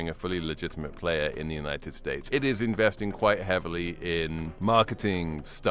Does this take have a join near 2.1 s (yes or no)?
yes